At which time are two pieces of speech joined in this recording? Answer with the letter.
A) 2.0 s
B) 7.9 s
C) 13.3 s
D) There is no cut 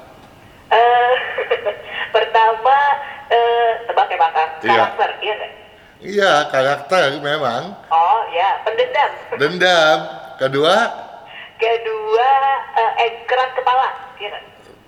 D